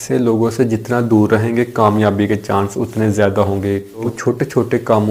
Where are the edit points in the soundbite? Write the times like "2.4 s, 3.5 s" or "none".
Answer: 4.1 s